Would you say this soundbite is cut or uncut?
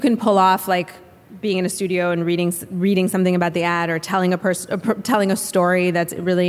uncut